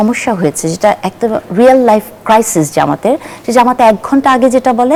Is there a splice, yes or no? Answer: no